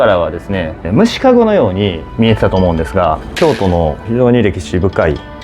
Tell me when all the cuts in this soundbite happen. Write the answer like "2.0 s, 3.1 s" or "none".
2.0 s, 3.3 s